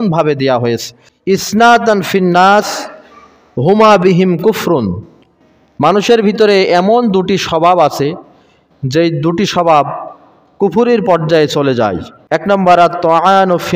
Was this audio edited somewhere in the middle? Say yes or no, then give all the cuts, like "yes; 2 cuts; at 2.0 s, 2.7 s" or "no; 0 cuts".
yes; 2 cuts; at 0.9 s, 12.4 s